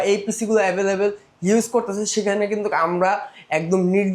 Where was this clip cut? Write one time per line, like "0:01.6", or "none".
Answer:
none